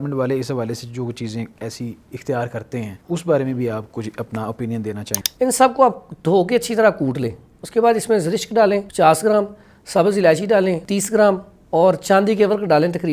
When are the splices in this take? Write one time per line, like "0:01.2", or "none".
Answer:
0:03.0
0:05.1
0:08.9
0:10.8